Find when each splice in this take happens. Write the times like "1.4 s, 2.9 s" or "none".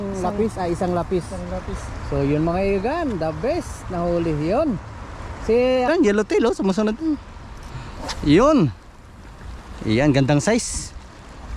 5.9 s